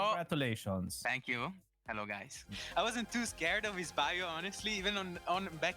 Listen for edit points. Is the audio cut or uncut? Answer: cut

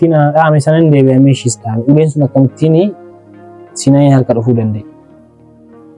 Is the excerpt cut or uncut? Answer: uncut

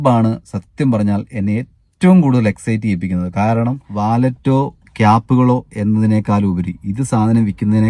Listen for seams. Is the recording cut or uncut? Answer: cut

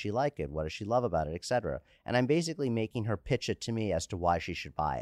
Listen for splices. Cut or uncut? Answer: uncut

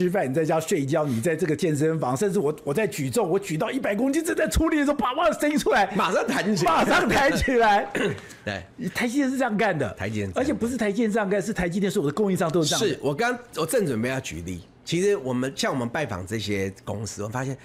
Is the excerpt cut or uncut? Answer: uncut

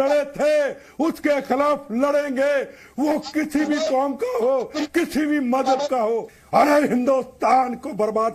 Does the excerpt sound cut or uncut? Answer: cut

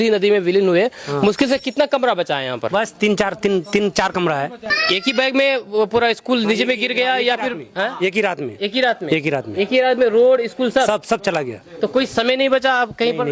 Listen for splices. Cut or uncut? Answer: cut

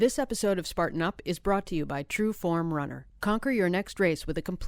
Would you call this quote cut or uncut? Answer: uncut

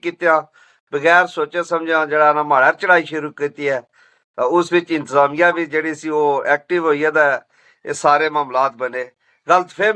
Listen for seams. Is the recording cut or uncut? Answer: uncut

